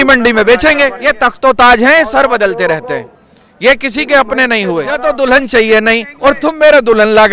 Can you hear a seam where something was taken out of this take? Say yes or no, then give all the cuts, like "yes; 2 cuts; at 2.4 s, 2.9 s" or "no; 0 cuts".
yes; 2 cuts; at 1.0 s, 5.0 s